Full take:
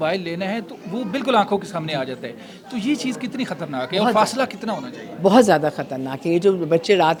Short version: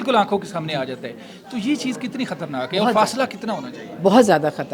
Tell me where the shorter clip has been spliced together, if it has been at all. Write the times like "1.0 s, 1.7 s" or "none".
none